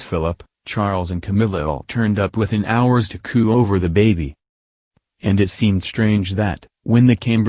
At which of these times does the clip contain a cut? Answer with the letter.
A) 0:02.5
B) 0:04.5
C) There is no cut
B